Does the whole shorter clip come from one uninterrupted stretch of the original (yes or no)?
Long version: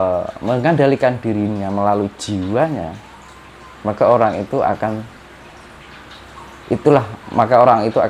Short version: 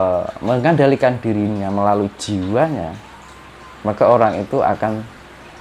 yes